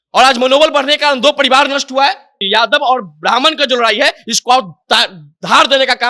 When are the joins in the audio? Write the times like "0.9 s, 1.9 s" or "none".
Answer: 2.4 s